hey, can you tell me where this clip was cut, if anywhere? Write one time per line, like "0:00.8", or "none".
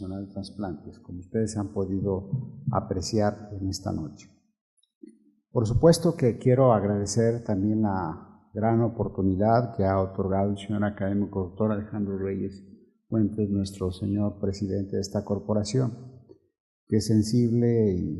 0:02.5